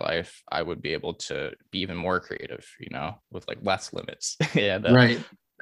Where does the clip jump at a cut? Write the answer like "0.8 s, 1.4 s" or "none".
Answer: none